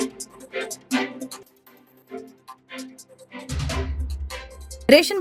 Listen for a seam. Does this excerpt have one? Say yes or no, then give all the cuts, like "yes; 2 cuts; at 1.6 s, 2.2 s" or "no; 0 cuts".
yes; 1 cut; at 1.0 s